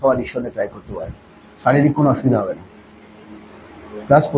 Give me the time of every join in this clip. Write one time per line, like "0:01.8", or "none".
none